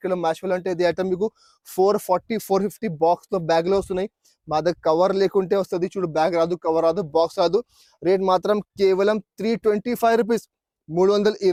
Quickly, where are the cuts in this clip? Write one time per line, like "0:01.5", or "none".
none

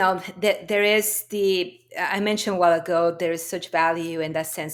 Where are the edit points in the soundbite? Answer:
none

